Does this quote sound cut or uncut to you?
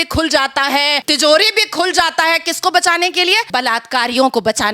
cut